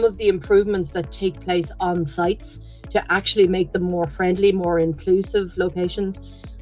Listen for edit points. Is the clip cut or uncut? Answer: uncut